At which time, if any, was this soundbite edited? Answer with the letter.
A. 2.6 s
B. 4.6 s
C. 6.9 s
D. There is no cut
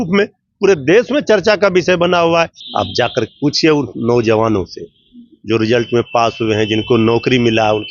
A